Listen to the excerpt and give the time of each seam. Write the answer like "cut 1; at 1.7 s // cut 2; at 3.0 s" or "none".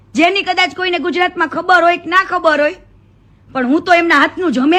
none